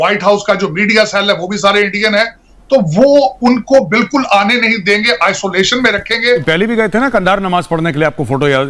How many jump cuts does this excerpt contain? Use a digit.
1